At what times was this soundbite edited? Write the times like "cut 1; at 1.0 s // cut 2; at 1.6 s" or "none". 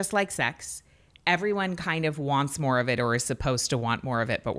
none